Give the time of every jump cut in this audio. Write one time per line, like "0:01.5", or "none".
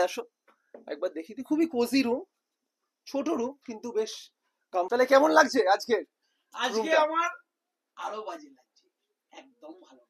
0:04.9